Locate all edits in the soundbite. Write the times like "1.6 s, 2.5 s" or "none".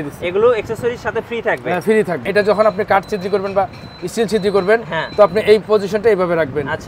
2.3 s